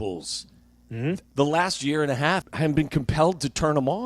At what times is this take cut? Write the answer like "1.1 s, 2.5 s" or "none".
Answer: 1.3 s, 2.5 s